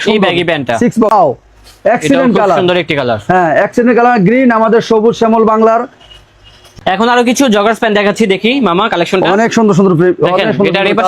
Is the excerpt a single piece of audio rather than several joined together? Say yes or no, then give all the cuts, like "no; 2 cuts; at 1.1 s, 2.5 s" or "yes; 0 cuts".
no; 2 cuts; at 1.1 s, 6.7 s